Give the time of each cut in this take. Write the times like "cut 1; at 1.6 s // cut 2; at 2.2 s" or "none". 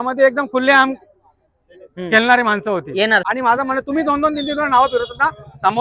cut 1; at 3.2 s